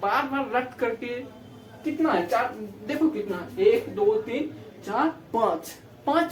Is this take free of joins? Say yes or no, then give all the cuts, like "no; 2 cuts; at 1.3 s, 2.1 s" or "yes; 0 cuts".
yes; 0 cuts